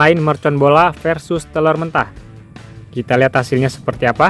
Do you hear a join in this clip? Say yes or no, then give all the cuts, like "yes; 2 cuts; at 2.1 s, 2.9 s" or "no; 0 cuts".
no; 0 cuts